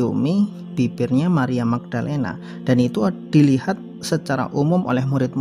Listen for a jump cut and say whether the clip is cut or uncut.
uncut